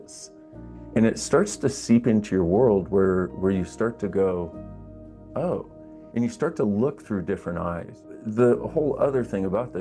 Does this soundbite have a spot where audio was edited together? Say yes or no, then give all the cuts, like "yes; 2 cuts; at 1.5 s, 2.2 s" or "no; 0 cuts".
yes; 1 cut; at 8.2 s